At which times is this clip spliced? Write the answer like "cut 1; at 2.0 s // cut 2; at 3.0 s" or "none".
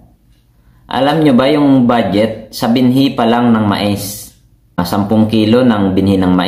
cut 1; at 4.8 s